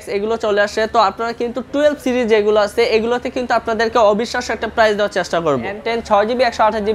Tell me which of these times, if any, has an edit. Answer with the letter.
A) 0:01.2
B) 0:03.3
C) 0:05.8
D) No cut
C